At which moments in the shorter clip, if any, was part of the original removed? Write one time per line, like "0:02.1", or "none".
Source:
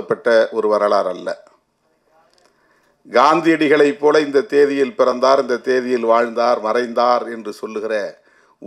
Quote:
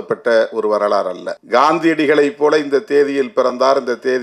0:01.3